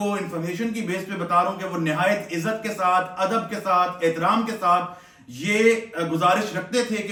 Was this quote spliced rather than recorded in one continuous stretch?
no; 0 cuts

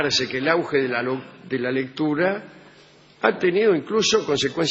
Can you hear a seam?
yes; 1 cut; at 1.7 s

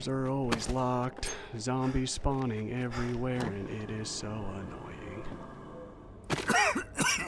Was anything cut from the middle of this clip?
no; 0 cuts

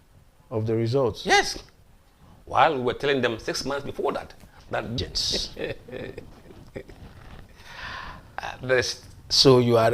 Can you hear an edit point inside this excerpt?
yes; 1 cut; at 5.0 s

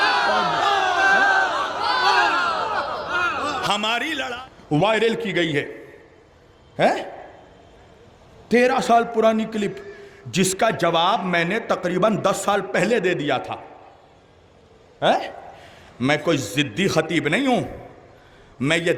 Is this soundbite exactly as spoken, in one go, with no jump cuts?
no; 1 cut; at 4.2 s

